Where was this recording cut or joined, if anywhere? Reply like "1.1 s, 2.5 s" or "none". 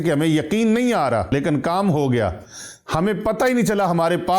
1.3 s